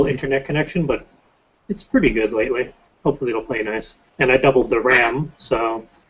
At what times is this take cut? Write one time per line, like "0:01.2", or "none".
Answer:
0:03.4